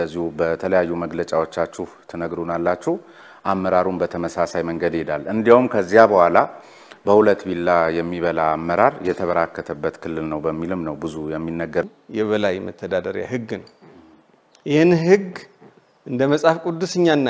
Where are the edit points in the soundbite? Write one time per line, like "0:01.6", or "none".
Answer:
0:11.8